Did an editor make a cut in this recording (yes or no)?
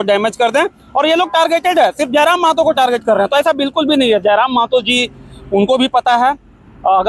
no